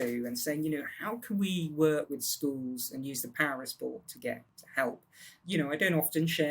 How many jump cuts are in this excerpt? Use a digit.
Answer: 3